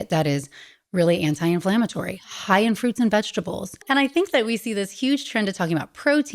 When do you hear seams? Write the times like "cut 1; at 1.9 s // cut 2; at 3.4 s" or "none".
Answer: cut 1; at 3.8 s